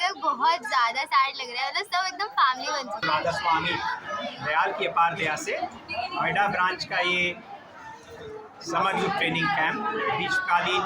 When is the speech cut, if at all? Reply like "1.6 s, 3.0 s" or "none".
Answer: 3.0 s